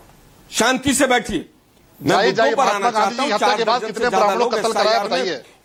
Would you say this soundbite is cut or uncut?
uncut